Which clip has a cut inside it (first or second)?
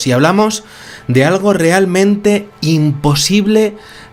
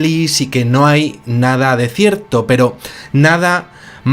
second